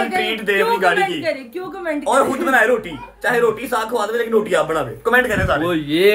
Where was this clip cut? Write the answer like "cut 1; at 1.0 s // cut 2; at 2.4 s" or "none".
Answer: none